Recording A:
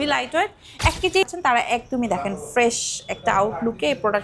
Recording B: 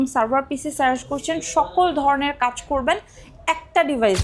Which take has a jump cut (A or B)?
A